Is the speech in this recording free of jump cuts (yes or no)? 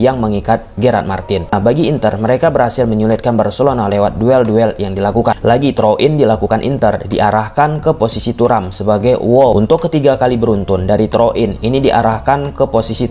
no